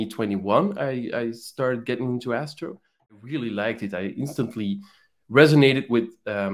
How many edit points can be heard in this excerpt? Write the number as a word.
one